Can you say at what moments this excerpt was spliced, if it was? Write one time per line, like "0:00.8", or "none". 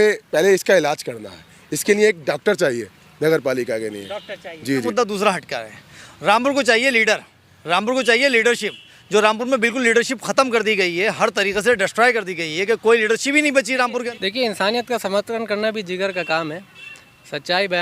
0:04.9
0:14.1